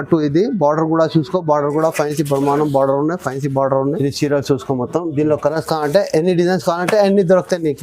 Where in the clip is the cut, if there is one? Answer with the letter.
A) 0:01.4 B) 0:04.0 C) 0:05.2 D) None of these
B